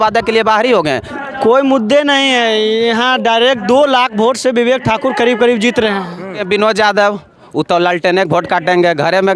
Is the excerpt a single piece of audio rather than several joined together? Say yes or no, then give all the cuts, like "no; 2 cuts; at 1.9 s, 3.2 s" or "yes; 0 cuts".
no; 2 cuts; at 1.1 s, 6.4 s